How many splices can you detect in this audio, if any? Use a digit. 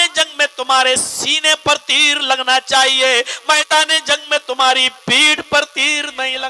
0